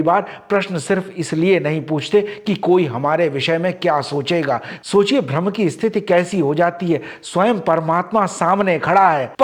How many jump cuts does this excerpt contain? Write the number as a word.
one